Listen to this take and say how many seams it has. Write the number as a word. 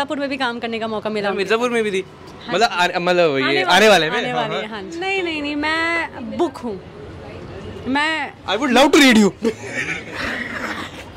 one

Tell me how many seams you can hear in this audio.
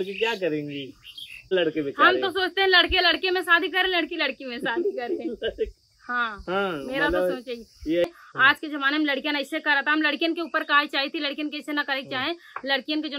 two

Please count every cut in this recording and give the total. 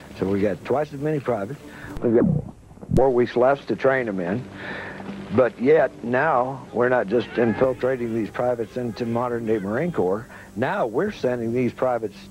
one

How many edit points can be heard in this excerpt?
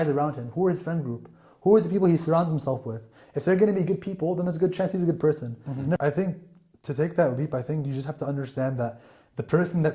one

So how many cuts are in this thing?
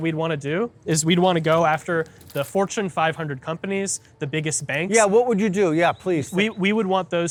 zero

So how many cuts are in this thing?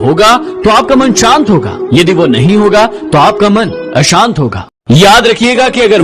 one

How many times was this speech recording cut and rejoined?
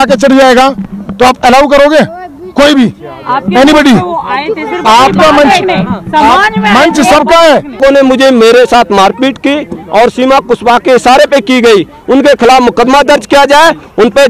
one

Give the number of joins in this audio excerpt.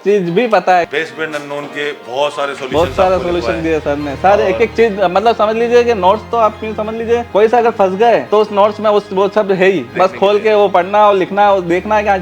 four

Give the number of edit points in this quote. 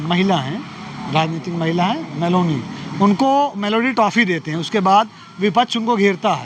zero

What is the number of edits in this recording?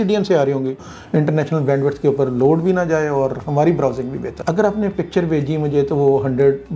two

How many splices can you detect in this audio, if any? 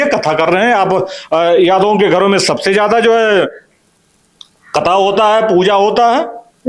zero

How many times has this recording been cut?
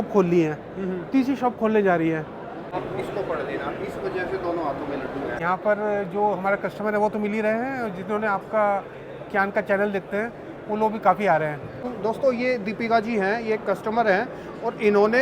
three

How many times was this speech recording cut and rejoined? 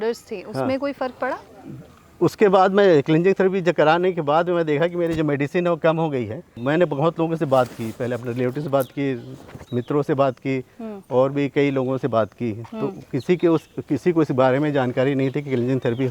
one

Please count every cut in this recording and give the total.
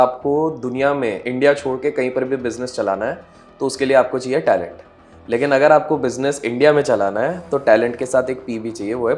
zero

